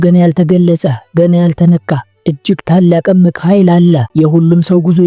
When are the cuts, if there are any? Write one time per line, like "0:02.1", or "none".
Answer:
0:04.1